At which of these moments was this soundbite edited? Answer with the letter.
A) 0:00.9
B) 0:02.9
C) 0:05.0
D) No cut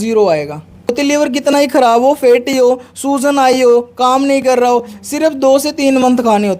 A